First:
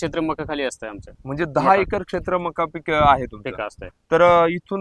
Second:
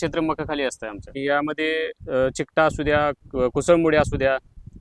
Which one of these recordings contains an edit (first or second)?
second